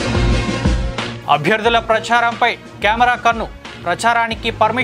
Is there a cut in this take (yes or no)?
no